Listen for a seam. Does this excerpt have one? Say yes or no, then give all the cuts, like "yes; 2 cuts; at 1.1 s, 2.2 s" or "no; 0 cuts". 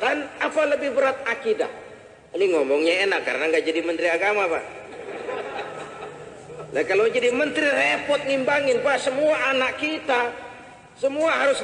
no; 0 cuts